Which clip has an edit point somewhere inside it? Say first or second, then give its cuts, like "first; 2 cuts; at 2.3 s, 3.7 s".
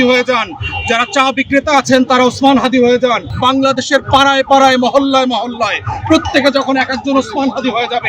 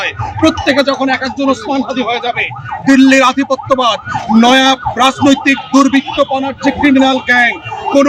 first; 1 cut; at 3.3 s